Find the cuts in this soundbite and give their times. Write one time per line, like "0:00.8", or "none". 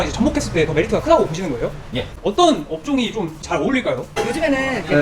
0:02.1
0:04.1